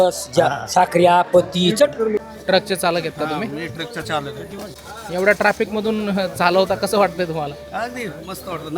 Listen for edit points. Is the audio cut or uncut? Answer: cut